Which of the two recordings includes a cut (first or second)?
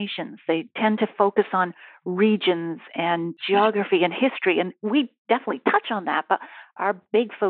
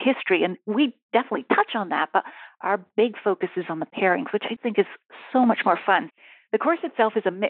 second